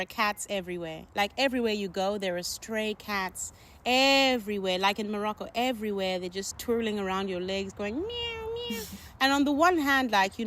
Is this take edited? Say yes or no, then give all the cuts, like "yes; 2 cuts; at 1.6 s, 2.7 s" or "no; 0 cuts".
yes; 1 cut; at 6.5 s